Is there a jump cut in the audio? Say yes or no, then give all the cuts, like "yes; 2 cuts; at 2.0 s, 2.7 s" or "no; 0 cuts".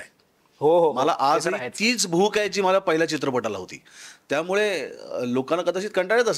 no; 0 cuts